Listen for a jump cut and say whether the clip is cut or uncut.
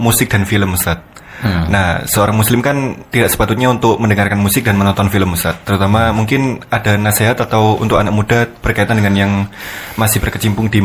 uncut